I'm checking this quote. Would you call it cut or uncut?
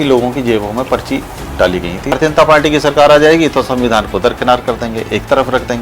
cut